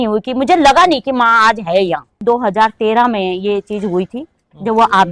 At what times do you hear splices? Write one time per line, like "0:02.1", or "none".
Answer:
0:02.2

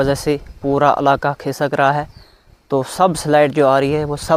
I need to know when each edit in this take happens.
none

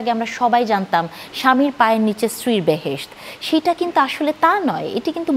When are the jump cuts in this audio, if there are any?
none

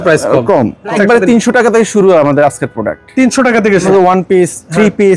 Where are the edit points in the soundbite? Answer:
0:00.9
0:03.9

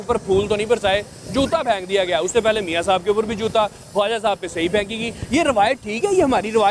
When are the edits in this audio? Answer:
none

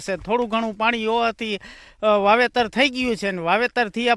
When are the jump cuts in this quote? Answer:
0:02.5

